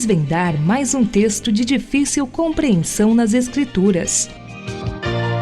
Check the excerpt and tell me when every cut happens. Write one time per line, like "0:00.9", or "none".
0:04.2